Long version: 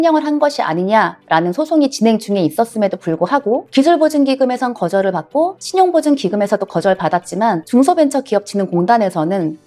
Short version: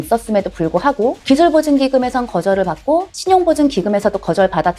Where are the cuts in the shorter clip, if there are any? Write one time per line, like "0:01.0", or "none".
none

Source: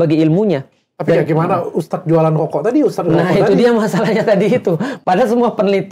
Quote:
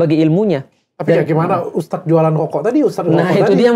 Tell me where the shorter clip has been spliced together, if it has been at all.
none

